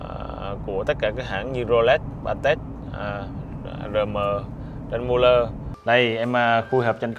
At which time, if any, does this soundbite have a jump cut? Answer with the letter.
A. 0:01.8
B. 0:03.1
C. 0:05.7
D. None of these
C